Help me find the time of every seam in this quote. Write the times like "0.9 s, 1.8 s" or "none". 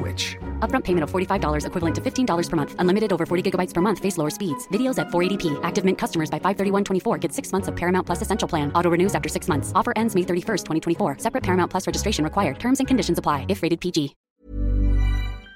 none